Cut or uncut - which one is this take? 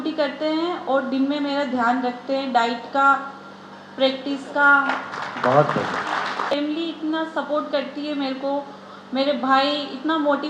cut